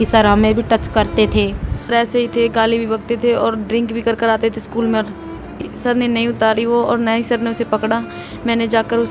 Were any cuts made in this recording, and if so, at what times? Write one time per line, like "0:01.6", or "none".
0:01.9
0:05.7